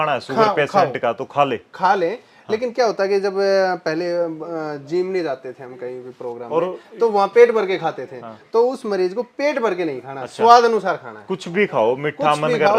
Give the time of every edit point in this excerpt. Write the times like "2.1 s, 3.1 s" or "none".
none